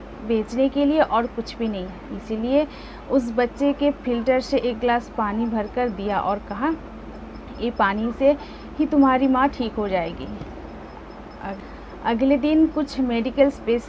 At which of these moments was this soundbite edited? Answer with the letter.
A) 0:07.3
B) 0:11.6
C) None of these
B